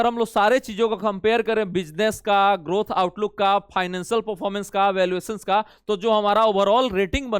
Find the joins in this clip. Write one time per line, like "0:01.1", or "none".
none